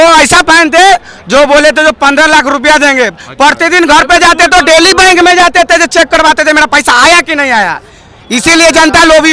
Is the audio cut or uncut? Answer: uncut